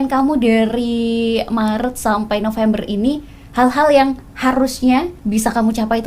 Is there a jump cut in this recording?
yes; 1 cut; at 5.2 s

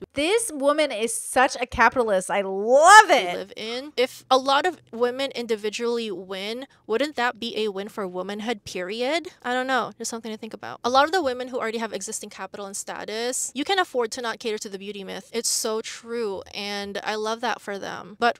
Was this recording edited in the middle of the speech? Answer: no; 0 cuts

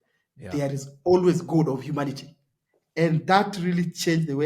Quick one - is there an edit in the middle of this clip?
yes; 1 cut; at 2.9 s

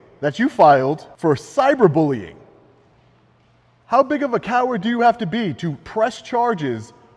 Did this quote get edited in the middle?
yes; 1 cut; at 1.1 s

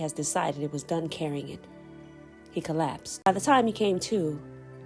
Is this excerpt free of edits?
no; 1 cut; at 3.3 s

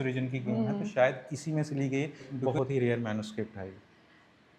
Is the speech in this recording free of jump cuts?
no; 1 cut; at 2.3 s

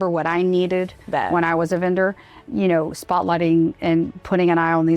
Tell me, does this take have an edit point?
yes; 2 cuts; at 1.0 s, 2.5 s

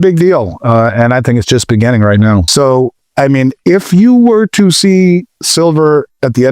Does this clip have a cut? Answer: yes; 1 cut; at 2.3 s

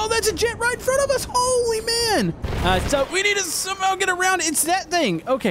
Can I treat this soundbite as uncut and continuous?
no; 1 cut; at 2.5 s

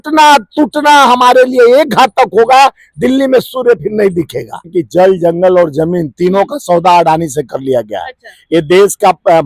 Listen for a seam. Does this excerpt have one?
yes; 1 cut; at 4.8 s

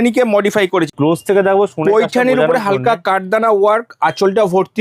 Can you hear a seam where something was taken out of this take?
yes; 1 cut; at 0.9 s

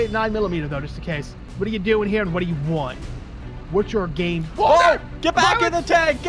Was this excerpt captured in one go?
no; 1 cut; at 1.4 s

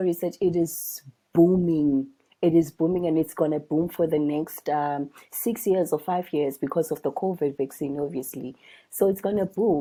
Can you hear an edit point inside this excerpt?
no; 0 cuts

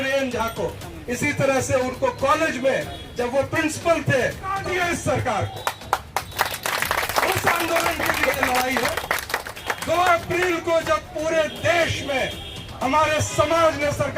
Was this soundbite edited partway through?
yes; 1 cut; at 4.6 s

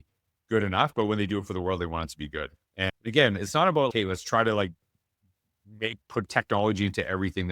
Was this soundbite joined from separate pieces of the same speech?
yes; 1 cut; at 2.9 s

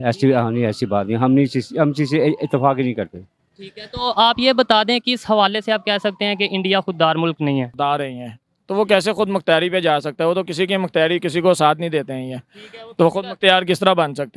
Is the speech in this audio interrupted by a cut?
yes; 1 cut; at 7.8 s

